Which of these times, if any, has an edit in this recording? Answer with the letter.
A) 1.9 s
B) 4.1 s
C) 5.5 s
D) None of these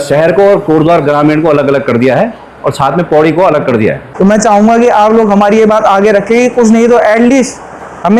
B